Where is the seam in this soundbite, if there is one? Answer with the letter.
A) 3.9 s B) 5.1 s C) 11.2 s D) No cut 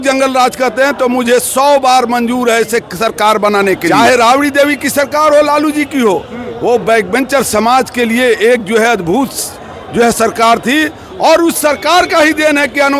A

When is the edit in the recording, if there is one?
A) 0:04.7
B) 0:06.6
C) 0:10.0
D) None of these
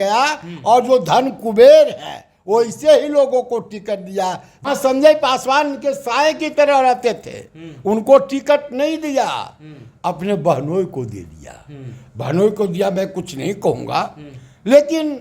A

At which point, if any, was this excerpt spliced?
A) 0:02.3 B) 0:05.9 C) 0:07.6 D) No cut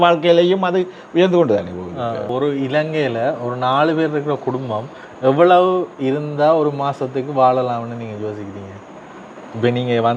A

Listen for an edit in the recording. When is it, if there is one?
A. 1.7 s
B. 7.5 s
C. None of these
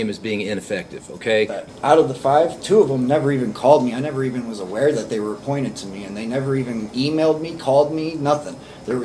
A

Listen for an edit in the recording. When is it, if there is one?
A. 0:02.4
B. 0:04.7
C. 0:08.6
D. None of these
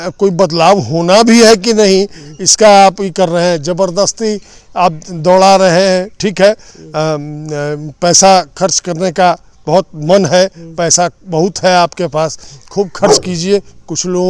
D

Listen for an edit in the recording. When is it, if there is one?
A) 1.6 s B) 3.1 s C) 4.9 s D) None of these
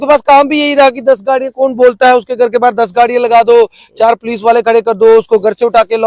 D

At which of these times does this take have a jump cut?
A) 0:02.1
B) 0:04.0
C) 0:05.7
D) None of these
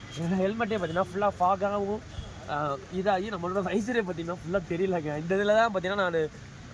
D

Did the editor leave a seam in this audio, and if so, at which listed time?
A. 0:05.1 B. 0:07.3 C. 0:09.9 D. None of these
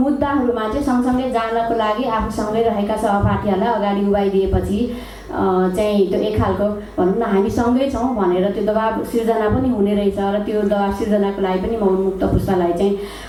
D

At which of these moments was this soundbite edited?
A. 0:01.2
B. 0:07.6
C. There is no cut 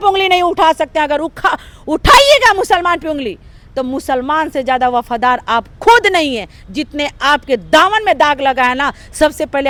C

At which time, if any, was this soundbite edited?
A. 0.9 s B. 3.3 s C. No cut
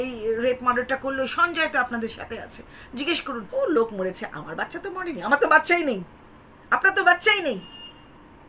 B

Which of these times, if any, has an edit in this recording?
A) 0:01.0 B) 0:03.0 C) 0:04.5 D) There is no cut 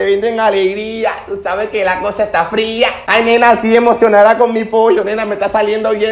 D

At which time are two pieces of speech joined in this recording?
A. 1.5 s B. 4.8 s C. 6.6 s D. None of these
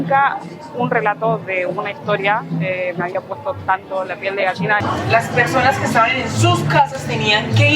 B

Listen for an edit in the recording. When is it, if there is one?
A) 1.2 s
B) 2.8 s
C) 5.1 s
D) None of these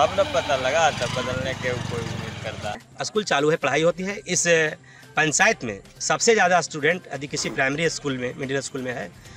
B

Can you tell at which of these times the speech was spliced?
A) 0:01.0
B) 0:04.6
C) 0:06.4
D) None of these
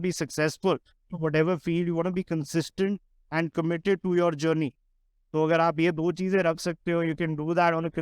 A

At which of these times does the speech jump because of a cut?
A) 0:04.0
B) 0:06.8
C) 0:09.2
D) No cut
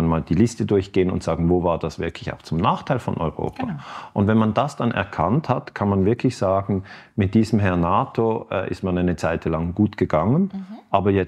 D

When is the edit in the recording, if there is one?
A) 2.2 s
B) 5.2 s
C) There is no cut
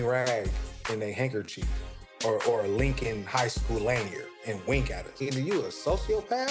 B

